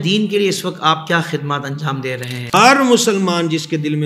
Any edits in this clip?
yes; 1 cut; at 2.5 s

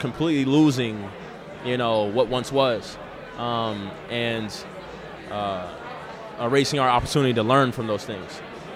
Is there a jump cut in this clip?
no; 0 cuts

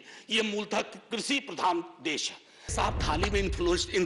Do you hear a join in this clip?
yes; 1 cut; at 2.7 s

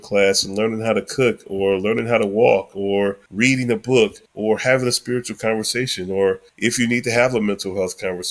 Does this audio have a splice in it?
yes; 3 cuts; at 3.2 s, 4.3 s, 6.5 s

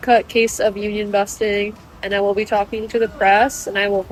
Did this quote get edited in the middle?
no; 0 cuts

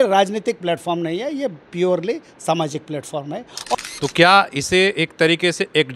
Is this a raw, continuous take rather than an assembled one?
no; 1 cut; at 3.7 s

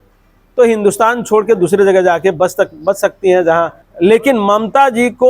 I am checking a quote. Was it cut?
yes; 1 cut; at 3.8 s

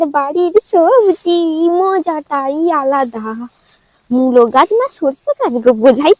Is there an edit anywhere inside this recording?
no; 0 cuts

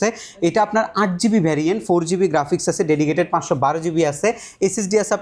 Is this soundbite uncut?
yes; 0 cuts

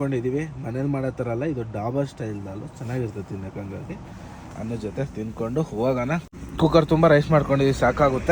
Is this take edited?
no; 0 cuts

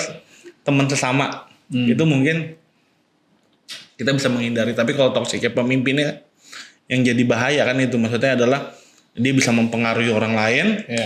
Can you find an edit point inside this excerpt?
no; 0 cuts

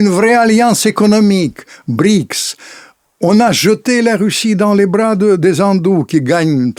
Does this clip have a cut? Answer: no; 0 cuts

